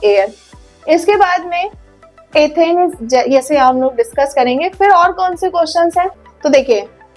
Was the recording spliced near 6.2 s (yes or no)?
yes